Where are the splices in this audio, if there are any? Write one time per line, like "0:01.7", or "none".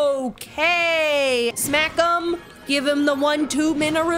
0:01.6

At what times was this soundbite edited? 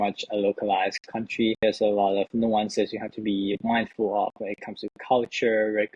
0:01.6

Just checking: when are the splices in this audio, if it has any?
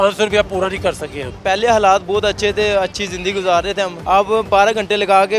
0:01.3
0:04.0

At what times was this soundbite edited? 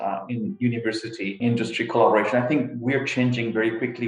0:01.4

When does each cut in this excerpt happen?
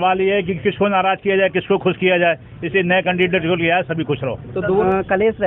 0:04.5

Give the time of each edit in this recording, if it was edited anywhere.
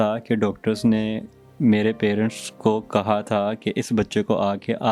none

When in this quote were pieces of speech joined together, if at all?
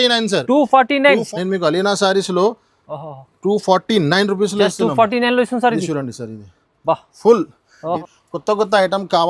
0:01.3
0:08.0

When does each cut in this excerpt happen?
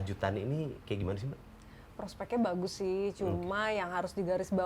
none

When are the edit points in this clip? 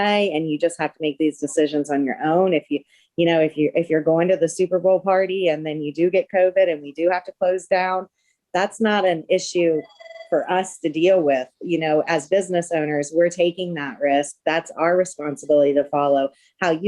none

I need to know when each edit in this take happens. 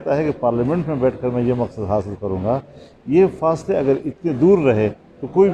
none

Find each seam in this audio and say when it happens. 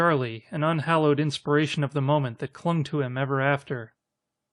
0:03.4

